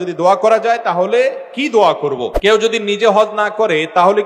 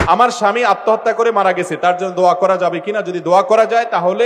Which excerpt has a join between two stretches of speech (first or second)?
first